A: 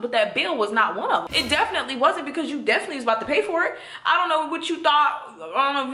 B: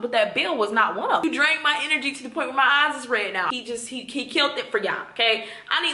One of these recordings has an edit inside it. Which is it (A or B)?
B